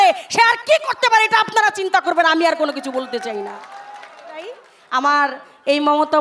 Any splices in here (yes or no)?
yes